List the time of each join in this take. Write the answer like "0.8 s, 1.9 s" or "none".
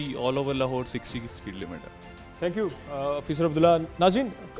none